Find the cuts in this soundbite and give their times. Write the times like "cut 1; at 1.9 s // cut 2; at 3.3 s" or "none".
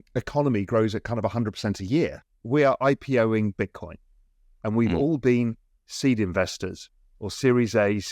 cut 1; at 2.3 s